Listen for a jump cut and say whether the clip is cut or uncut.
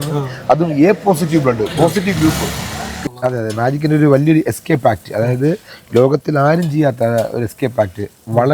cut